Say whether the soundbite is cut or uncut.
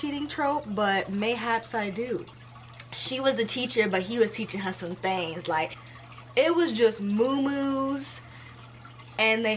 cut